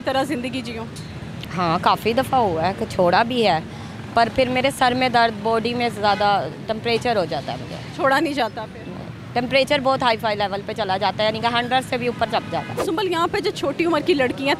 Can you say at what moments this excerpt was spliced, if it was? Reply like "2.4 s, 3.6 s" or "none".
12.7 s